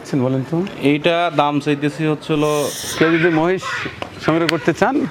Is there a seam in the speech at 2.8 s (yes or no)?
yes